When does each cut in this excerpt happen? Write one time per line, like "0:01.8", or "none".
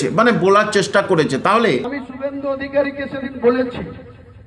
0:02.0